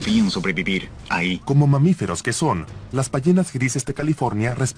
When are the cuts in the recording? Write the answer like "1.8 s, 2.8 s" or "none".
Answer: 3.4 s